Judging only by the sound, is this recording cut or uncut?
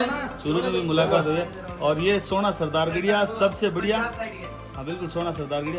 uncut